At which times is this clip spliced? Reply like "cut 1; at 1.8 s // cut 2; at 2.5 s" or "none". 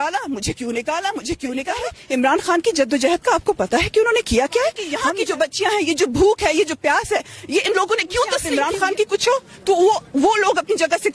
cut 1; at 1.9 s // cut 2; at 4.9 s // cut 3; at 8.4 s